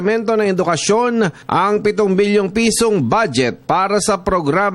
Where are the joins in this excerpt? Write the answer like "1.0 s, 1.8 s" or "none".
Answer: 1.4 s